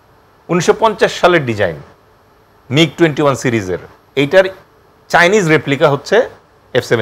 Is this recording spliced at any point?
no; 0 cuts

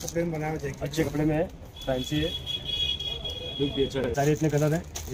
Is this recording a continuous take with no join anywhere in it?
no; 1 cut; at 4.1 s

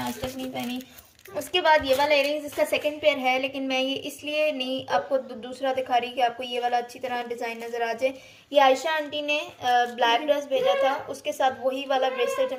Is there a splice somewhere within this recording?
no; 0 cuts

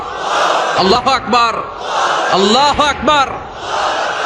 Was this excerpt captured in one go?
no; 1 cut; at 0.9 s

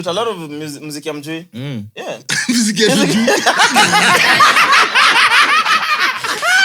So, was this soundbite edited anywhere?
no; 0 cuts

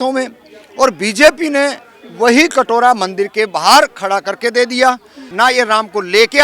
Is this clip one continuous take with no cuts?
no; 1 cut; at 5.2 s

